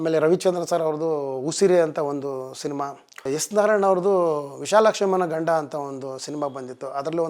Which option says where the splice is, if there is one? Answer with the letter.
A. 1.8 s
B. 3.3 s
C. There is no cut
B